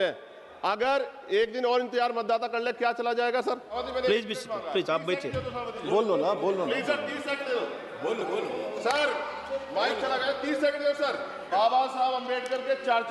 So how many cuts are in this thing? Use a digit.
2